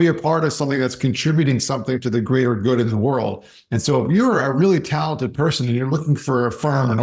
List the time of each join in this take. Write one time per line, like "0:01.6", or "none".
none